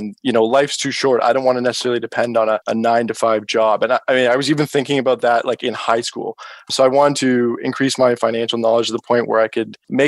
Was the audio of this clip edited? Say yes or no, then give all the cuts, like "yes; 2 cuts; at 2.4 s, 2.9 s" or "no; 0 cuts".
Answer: no; 0 cuts